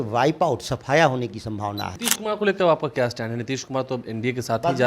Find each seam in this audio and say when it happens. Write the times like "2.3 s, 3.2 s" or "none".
1.9 s